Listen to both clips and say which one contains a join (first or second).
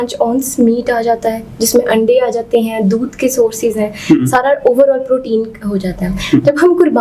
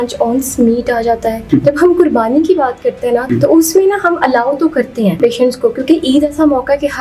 second